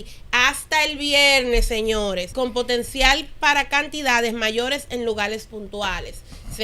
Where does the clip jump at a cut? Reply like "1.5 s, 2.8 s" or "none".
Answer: 2.3 s

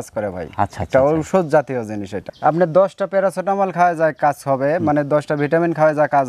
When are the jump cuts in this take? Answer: 2.3 s

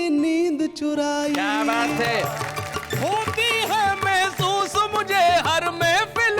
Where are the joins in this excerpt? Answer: 2.4 s

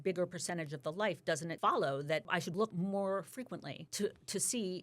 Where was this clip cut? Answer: 1.5 s, 2.7 s, 3.8 s

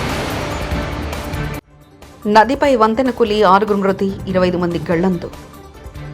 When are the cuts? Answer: 1.3 s

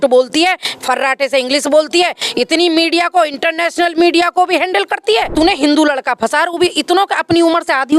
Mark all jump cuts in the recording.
5.3 s

